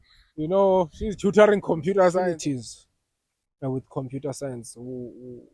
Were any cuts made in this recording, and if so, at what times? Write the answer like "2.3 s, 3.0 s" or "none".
2.4 s